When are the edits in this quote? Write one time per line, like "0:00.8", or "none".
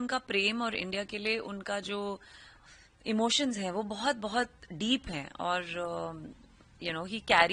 none